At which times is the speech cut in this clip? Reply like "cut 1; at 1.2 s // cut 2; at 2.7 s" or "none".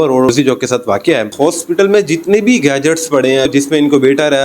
cut 1; at 1.2 s // cut 2; at 3.5 s